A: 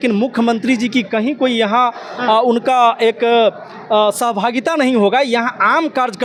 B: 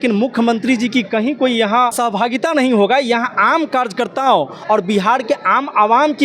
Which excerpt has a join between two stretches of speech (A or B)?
B